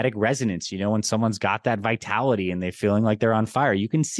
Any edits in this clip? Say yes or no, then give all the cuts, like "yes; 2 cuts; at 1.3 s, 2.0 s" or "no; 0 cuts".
no; 0 cuts